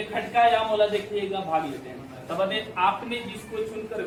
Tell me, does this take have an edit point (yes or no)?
no